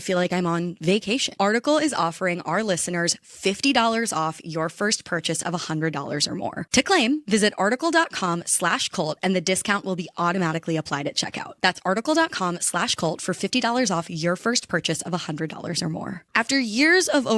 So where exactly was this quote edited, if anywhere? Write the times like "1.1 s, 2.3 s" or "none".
1.3 s, 16.2 s